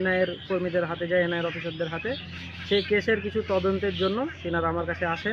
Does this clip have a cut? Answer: no; 0 cuts

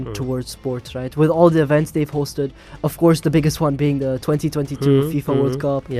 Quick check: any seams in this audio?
no; 0 cuts

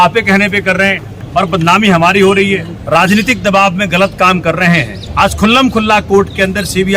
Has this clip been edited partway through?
yes; 3 cuts; at 1.1 s, 2.7 s, 5.0 s

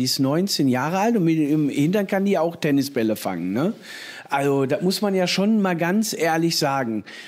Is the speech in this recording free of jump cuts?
yes; 0 cuts

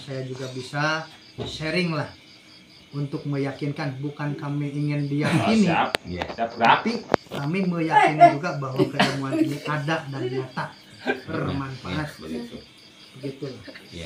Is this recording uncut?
no; 1 cut; at 11.3 s

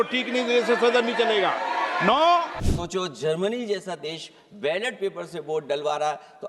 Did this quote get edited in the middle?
yes; 1 cut; at 2.6 s

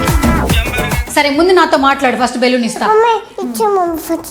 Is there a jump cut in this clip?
yes; 1 cut; at 1.0 s

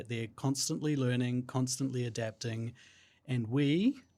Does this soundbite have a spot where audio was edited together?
no; 0 cuts

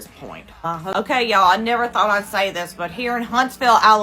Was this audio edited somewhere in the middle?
yes; 1 cut; at 0.9 s

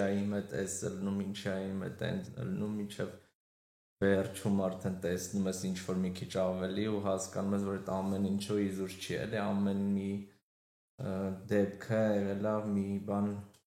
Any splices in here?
no; 0 cuts

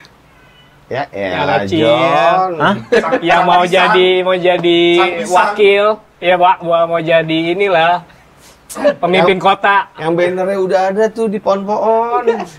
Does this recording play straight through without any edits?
yes; 0 cuts

